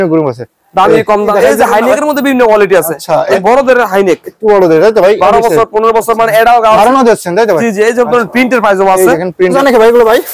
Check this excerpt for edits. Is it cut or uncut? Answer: cut